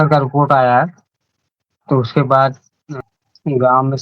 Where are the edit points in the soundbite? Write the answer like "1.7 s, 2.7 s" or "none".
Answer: 3.0 s